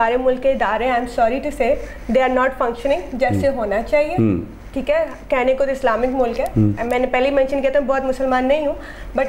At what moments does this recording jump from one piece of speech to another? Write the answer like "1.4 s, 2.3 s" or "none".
none